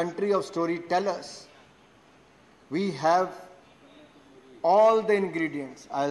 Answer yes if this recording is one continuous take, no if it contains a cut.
yes